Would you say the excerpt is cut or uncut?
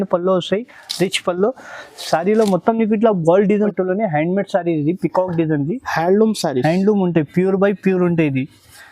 cut